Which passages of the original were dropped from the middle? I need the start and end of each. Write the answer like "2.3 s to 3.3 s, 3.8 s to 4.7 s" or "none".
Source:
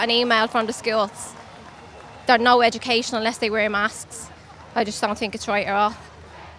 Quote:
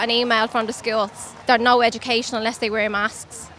1.3 s to 2.1 s